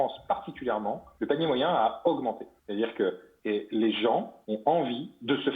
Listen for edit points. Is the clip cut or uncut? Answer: cut